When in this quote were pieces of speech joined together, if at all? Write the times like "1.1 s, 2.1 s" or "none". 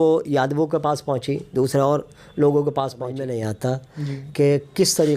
3.2 s